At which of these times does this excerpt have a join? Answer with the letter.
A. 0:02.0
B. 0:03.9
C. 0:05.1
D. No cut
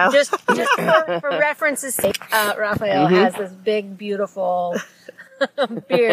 A